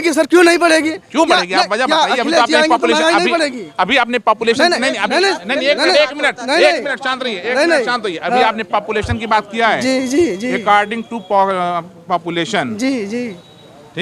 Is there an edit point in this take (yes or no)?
no